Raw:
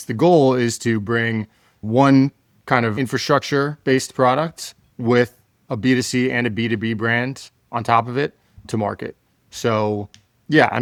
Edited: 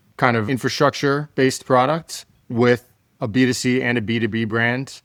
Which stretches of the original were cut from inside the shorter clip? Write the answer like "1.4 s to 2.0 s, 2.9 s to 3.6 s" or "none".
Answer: none